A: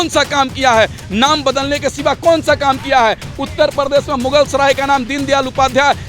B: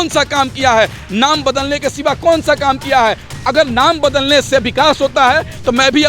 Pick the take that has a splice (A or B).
B